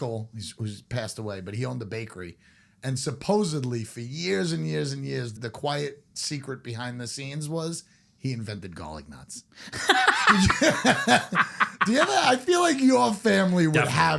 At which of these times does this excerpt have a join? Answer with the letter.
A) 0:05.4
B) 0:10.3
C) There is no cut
A